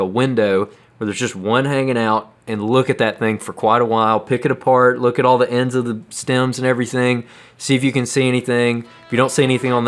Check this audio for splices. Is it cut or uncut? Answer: uncut